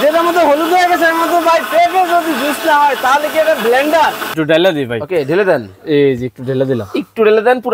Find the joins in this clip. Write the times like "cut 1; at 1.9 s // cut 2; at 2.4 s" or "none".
cut 1; at 4.2 s